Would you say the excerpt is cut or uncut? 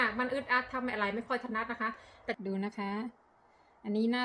cut